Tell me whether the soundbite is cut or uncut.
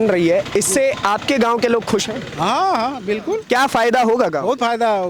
uncut